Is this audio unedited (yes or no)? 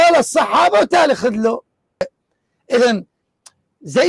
no